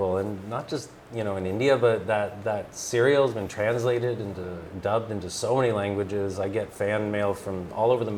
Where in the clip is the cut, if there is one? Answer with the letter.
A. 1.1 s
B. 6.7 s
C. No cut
C